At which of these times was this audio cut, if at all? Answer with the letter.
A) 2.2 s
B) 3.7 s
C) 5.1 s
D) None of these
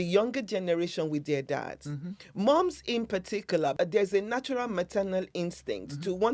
B